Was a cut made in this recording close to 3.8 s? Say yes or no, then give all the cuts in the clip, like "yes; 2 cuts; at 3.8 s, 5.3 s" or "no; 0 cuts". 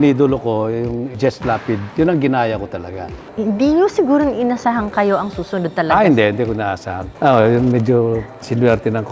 no; 2 cuts; at 1.6 s, 7.0 s